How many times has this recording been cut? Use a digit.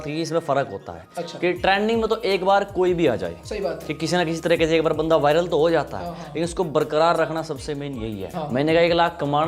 1